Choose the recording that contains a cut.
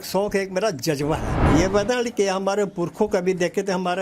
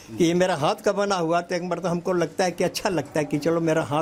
first; 1 cut; at 1.4 s

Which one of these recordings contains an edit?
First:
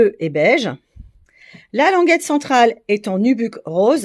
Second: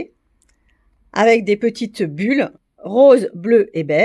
second; 1 cut; at 2.6 s

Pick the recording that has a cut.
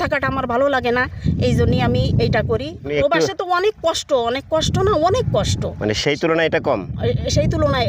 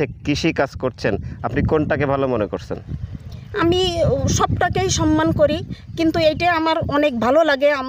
first; 1 cut; at 2.9 s

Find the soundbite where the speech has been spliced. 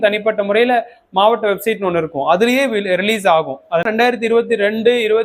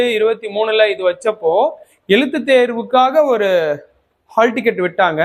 first; 1 cut; at 3.9 s

